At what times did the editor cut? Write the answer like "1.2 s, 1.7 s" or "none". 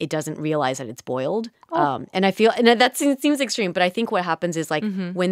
none

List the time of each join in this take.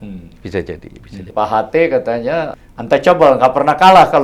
1.2 s, 2.6 s

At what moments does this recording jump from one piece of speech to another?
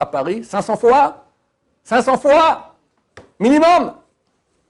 none

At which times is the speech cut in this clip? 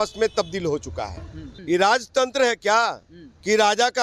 1.5 s

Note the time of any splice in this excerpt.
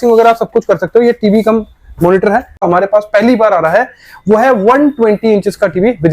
2.6 s

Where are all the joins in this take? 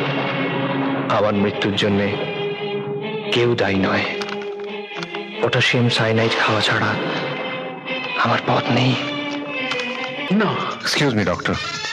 none

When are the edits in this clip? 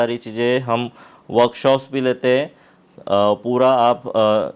none

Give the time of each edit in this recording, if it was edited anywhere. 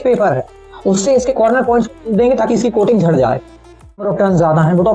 4.0 s

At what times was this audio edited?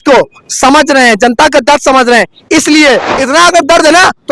3.1 s

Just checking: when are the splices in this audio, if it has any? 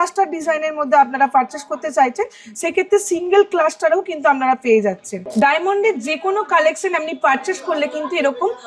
5.1 s

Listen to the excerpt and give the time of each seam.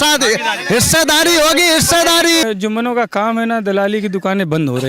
2.4 s

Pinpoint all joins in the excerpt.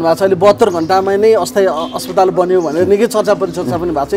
none

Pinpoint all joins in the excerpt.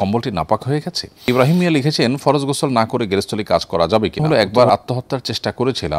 1.3 s, 4.2 s

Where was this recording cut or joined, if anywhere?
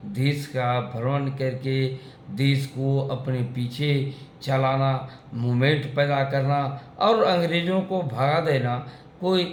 none

